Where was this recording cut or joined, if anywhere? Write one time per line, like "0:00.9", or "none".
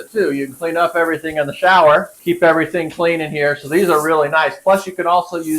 0:02.1